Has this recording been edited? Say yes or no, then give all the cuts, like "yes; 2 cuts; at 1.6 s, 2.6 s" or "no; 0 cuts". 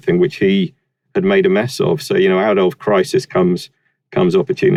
no; 0 cuts